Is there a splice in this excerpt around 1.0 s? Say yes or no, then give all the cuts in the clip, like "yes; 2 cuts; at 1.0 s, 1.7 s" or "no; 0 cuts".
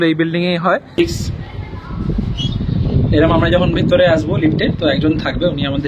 yes; 1 cut; at 1.0 s